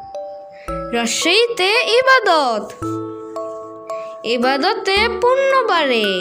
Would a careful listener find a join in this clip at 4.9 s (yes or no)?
no